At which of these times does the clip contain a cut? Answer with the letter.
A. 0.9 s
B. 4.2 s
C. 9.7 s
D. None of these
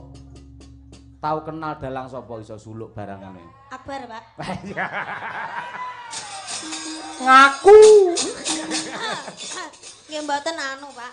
D